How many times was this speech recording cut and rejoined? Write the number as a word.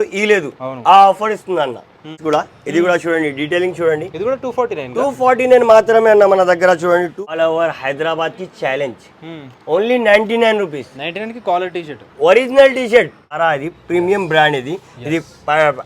three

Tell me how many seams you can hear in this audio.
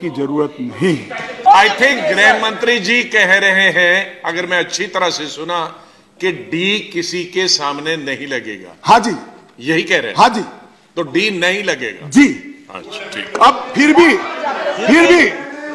one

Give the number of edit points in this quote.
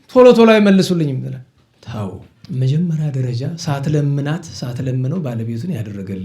one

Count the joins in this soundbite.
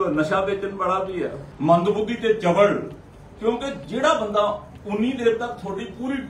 one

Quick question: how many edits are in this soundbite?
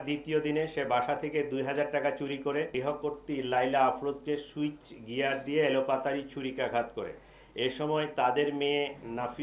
one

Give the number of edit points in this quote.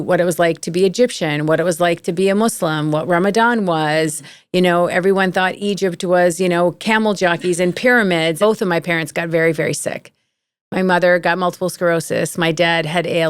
one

